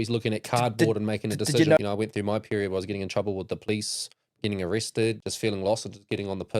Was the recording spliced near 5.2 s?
yes; 2 cuts; at 1.8 s, 5.2 s

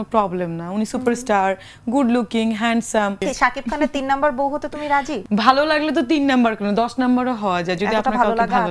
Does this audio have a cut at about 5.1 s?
yes; 2 cuts; at 3.2 s, 5.1 s

